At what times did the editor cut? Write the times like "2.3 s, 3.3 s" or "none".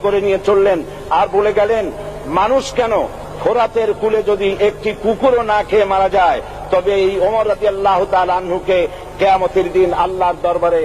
none